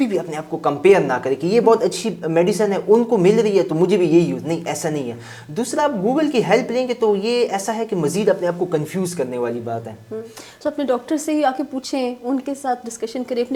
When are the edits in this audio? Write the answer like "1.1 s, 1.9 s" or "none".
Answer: none